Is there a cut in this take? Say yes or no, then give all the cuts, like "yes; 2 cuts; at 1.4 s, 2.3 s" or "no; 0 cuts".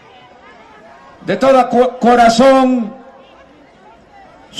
yes; 1 cut; at 2.8 s